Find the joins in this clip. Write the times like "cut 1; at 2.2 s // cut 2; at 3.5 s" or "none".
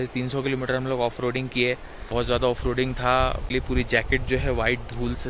cut 1; at 1.5 s // cut 2; at 3.4 s